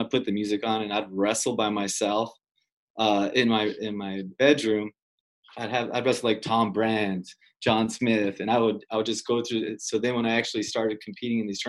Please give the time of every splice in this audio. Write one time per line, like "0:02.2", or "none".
0:05.1

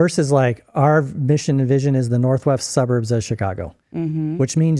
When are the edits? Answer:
none

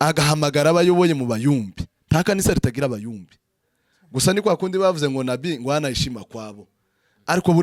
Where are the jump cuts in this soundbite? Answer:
none

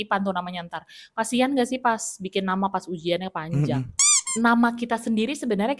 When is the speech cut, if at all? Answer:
0:03.9

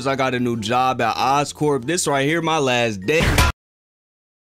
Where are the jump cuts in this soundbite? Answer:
none

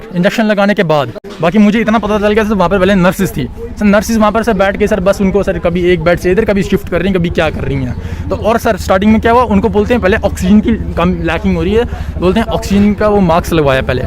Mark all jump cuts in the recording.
0:01.2

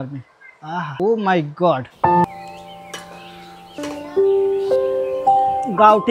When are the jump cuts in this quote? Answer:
0:00.9
0:02.2
0:03.8

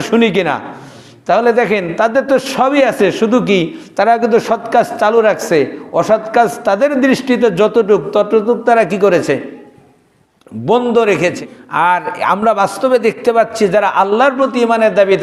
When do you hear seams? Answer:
0:11.4

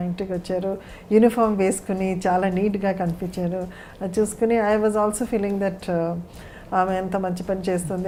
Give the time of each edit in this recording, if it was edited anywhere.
none

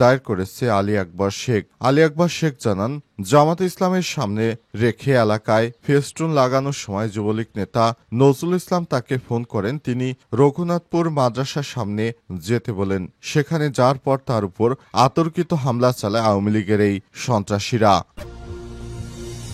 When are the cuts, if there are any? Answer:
0:18.1

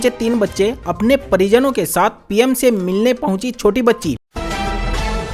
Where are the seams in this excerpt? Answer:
0:04.3

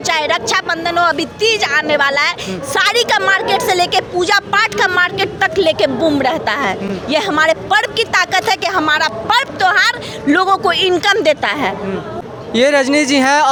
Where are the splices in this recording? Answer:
none

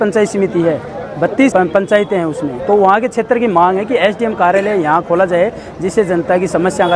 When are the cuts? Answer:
0:01.5

